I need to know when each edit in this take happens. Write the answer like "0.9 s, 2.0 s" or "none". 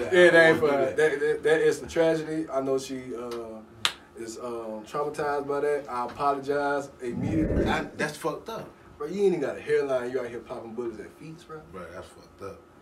7.5 s